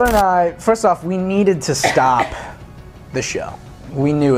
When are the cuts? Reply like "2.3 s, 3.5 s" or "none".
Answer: none